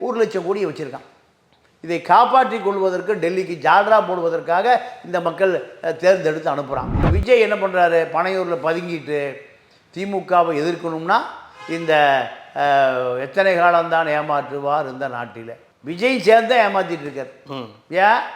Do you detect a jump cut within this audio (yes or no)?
yes